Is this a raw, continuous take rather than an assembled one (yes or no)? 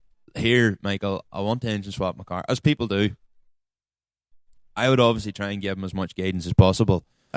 yes